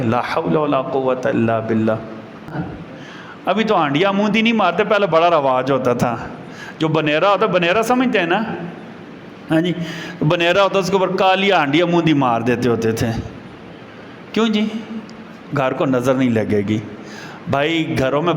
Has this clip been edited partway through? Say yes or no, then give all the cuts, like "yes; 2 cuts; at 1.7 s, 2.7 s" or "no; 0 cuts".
yes; 1 cut; at 2.5 s